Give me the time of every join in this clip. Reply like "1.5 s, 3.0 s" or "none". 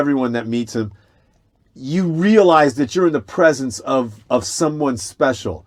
none